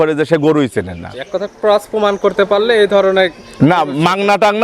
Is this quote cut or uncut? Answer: uncut